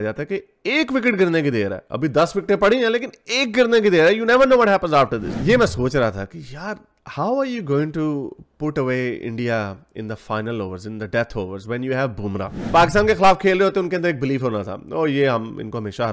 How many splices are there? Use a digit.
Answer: 2